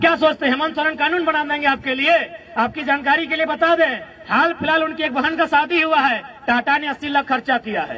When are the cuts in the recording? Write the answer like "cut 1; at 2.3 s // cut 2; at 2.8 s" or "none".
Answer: none